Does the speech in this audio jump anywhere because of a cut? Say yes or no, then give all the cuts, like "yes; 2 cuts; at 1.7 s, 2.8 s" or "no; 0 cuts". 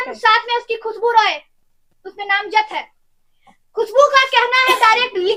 no; 0 cuts